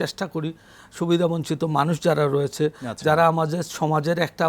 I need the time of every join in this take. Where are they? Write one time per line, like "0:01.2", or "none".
none